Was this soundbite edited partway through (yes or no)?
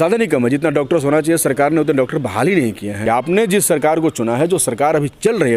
yes